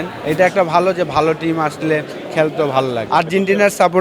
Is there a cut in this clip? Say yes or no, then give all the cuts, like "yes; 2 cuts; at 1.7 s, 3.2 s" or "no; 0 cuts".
yes; 1 cut; at 3.0 s